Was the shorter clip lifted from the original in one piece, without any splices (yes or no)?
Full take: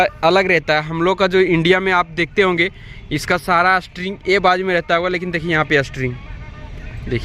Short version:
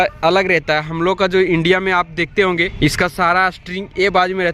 no